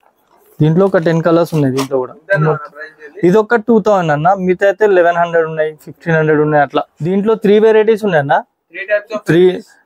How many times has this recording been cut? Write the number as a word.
one